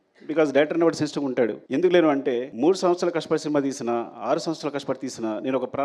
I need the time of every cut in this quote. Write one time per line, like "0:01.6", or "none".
0:01.6
0:02.5